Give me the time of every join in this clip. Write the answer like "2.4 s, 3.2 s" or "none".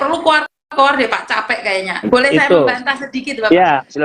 1.9 s